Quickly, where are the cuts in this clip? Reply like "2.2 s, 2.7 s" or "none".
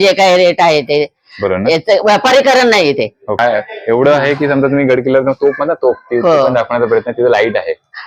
3.4 s